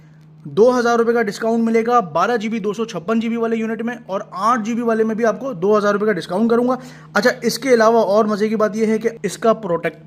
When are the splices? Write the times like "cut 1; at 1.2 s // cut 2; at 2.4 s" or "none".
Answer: none

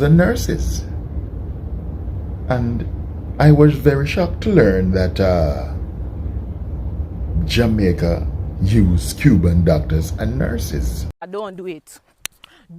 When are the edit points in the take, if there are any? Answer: cut 1; at 11.1 s

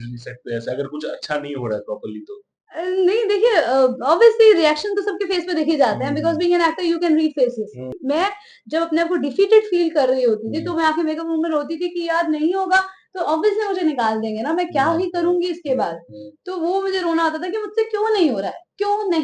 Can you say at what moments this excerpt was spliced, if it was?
cut 1; at 8.0 s

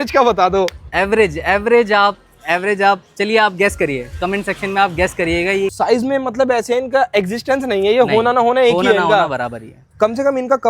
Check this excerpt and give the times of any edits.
cut 1; at 5.7 s

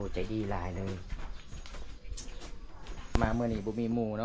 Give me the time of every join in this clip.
cut 1; at 3.2 s

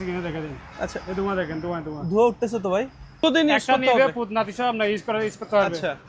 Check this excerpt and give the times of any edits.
cut 1; at 3.2 s

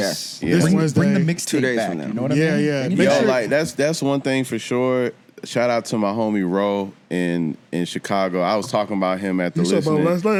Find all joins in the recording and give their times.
none

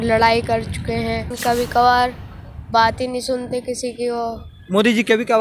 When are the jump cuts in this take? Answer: cut 1; at 1.3 s

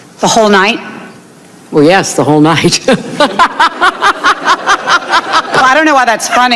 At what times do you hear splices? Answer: none

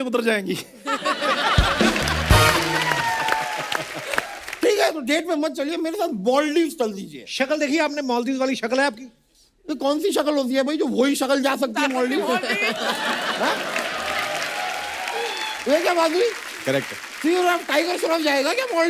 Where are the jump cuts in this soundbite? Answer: cut 1; at 4.4 s

